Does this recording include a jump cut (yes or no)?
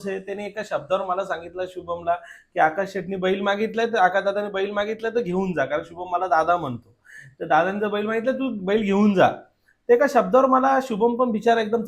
no